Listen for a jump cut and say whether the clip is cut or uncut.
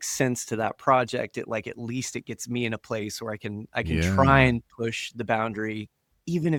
uncut